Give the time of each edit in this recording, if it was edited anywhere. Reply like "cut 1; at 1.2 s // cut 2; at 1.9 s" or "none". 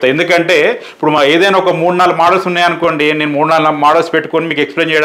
none

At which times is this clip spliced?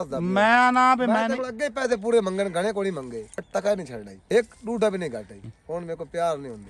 cut 1; at 3.3 s // cut 2; at 4.2 s // cut 3; at 5.4 s

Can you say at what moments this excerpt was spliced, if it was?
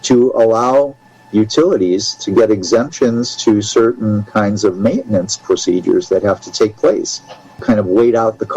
cut 1; at 7.6 s

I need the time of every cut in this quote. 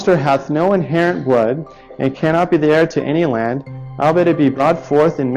none

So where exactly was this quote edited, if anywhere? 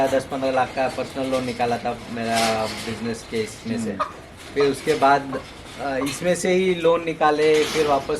none

